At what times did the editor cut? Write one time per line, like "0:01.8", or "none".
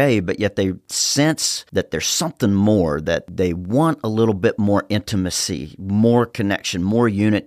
0:03.3

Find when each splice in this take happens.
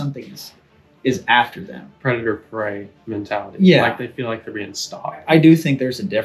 0:05.2

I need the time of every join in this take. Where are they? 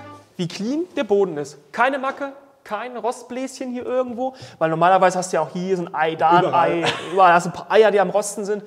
none

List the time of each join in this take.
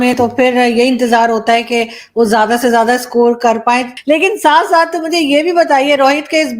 0:03.9

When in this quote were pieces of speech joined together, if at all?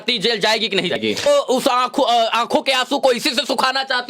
0:01.3

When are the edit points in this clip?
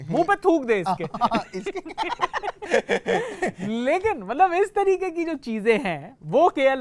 none

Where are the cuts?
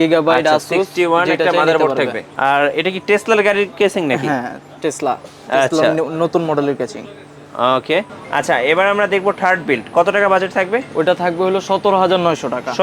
0:02.2
0:08.2

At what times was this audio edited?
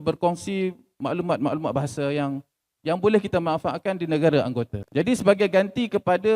0:04.8

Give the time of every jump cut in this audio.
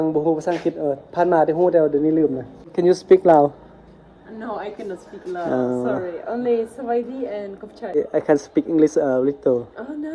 0:02.7
0:08.0

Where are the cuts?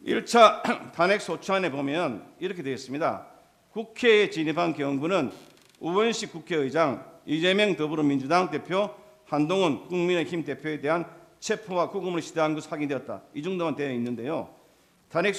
none

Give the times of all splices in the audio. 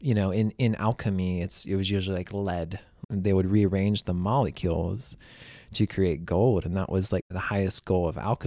0:03.0
0:07.3

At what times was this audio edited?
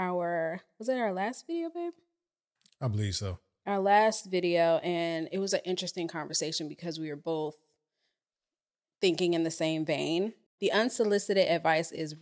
0:10.5

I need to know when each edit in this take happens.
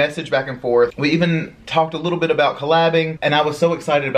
0:01.0
0:03.1

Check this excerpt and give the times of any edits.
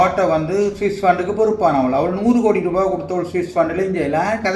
none

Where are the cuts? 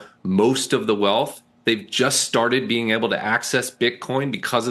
none

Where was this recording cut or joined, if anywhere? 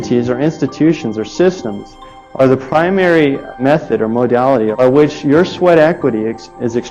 0:03.5
0:04.7

